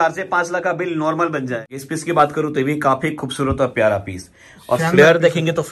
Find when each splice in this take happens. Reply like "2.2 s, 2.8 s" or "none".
1.6 s